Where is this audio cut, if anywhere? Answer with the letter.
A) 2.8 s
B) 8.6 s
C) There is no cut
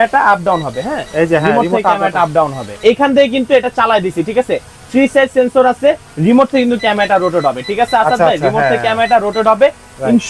A